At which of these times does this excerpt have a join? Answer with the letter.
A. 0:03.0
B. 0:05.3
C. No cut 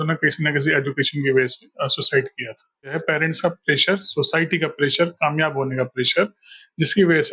A